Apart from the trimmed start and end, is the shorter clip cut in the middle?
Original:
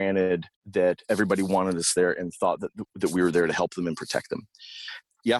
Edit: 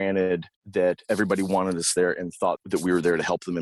yes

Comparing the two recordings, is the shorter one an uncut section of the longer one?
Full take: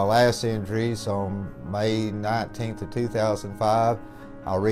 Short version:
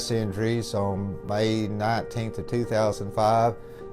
no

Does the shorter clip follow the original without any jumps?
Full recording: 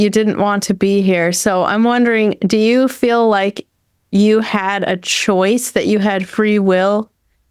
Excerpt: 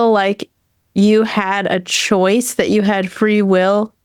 yes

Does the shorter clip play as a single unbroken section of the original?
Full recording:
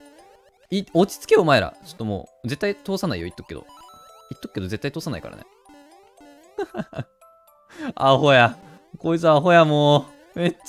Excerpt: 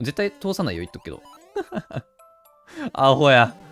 no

